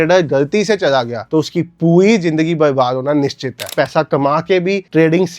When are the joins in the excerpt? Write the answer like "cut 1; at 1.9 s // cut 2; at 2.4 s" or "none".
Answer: cut 1; at 3.7 s